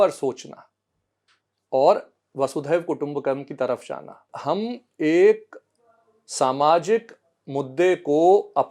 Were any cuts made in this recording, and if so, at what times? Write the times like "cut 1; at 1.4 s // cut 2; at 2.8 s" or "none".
cut 1; at 4.2 s